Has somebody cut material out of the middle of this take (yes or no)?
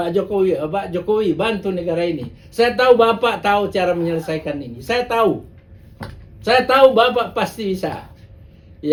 no